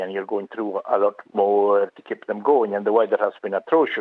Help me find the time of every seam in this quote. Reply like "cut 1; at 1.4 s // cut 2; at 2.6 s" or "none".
cut 1; at 1.9 s